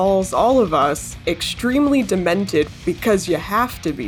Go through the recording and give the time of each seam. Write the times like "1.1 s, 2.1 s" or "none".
2.7 s